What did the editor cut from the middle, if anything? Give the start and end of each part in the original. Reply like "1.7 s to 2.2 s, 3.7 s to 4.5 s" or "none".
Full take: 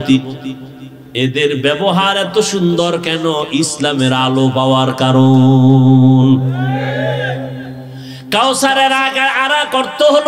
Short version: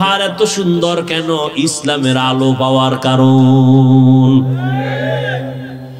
none